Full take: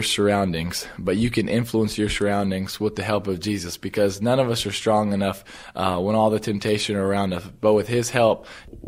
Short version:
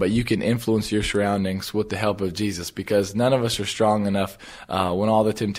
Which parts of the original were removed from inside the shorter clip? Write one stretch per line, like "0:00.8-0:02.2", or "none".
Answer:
none